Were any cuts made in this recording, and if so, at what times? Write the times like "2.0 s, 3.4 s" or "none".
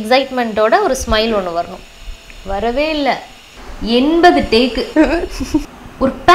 3.5 s, 5.6 s